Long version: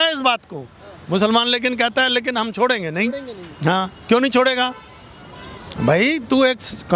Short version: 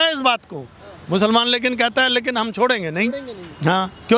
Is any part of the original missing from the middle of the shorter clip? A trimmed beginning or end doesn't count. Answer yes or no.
no